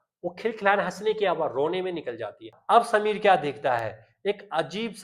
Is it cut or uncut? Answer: cut